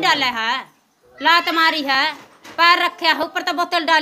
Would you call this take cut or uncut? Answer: uncut